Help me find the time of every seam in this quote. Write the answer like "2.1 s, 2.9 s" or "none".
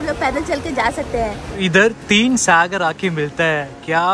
1.6 s